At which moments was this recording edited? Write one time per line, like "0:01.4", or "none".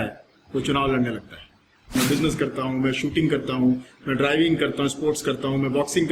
0:02.0